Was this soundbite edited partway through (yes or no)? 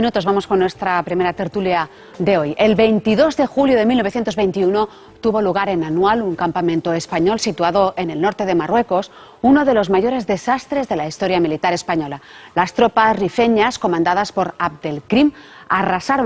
no